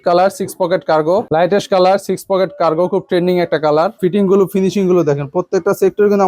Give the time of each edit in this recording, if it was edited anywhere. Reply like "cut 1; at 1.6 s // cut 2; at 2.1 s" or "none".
cut 1; at 1.3 s // cut 2; at 4.0 s